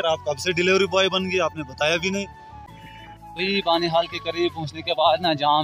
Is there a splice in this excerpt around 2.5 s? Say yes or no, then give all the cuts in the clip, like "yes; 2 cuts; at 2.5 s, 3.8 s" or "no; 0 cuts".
yes; 1 cut; at 2.5 s